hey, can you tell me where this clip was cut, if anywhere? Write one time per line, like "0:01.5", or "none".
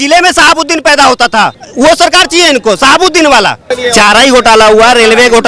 0:01.6
0:03.7